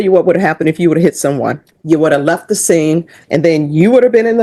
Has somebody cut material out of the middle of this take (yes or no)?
yes